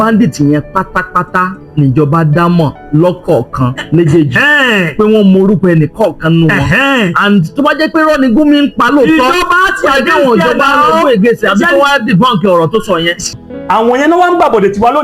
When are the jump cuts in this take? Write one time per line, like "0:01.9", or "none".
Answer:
0:13.3